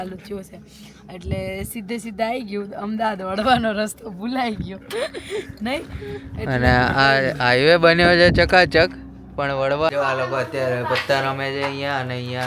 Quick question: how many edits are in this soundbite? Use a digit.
1